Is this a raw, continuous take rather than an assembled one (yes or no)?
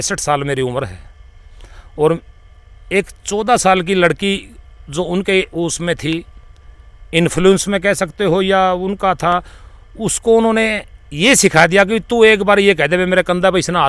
yes